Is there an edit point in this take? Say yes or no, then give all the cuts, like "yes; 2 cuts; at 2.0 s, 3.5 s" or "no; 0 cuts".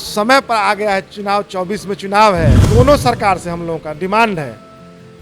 yes; 1 cut; at 2.6 s